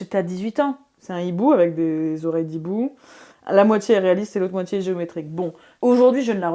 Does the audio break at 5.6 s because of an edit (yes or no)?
yes